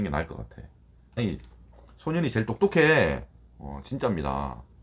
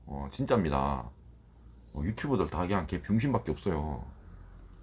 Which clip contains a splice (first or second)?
first